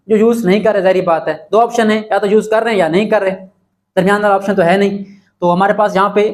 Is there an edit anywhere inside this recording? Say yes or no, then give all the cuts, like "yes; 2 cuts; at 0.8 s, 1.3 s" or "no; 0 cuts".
no; 0 cuts